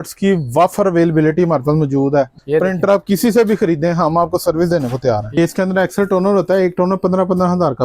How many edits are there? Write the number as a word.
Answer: two